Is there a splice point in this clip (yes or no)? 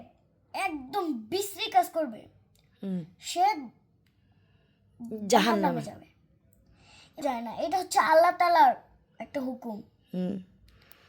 yes